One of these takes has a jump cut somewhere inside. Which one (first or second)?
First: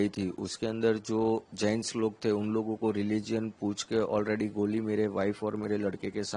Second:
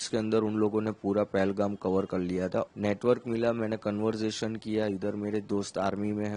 second